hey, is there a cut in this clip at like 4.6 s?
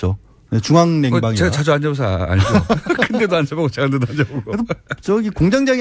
no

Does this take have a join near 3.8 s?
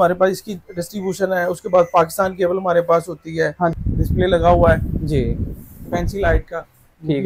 yes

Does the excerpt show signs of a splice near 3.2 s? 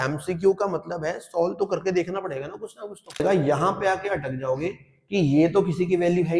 yes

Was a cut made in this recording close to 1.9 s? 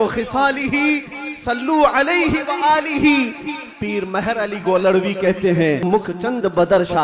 no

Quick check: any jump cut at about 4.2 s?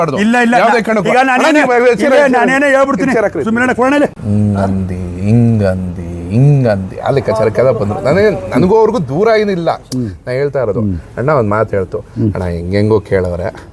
yes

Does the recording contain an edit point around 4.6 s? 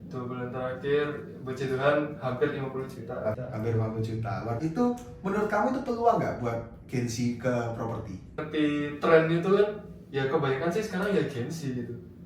yes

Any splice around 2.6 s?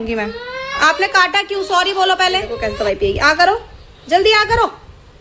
yes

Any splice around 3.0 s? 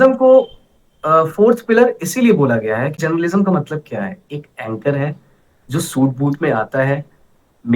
yes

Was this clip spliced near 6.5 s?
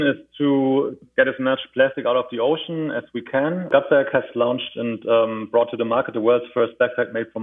no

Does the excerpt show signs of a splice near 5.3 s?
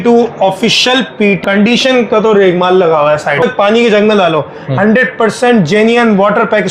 no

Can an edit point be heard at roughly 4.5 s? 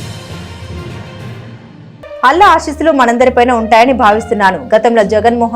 no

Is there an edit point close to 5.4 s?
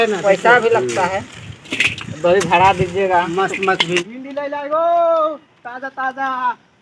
no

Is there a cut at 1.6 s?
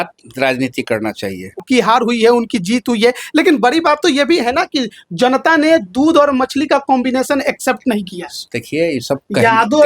yes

